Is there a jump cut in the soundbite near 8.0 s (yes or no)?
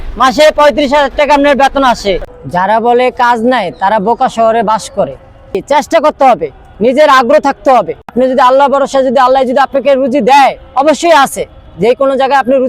yes